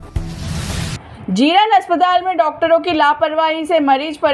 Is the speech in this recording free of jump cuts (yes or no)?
no